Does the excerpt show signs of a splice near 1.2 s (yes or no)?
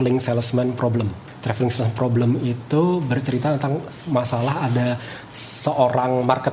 yes